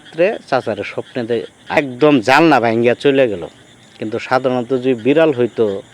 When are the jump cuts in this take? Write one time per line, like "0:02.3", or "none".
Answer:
0:01.8